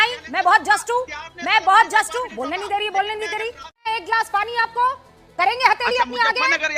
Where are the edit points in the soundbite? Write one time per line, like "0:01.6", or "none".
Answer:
0:03.7
0:05.2